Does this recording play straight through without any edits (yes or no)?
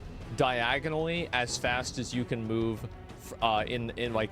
yes